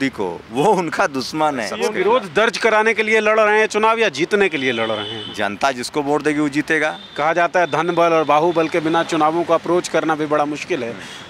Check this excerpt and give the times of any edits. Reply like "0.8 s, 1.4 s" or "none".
1.7 s, 7.0 s